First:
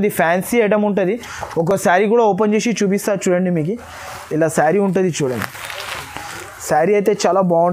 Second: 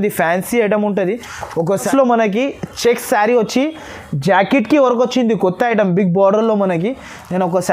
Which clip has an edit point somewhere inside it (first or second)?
second